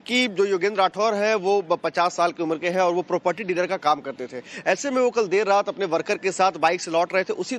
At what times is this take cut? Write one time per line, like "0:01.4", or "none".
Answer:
0:03.1